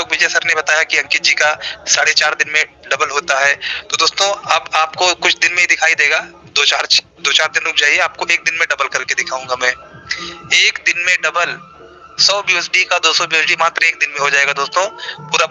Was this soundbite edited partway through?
no; 0 cuts

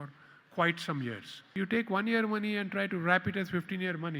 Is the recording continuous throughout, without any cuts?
no; 1 cut; at 1.5 s

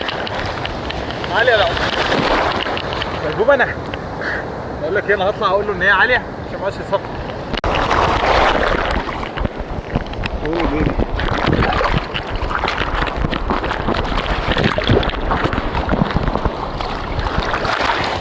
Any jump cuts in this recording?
no; 0 cuts

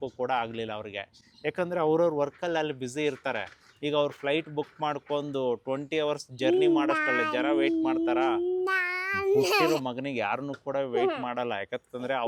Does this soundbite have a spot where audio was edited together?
no; 0 cuts

